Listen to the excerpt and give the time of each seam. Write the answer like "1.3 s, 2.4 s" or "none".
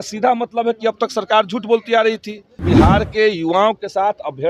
2.6 s